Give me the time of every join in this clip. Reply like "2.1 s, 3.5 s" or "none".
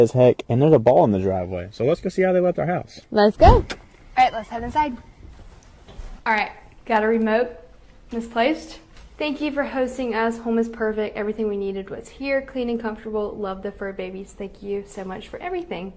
2.1 s, 8.8 s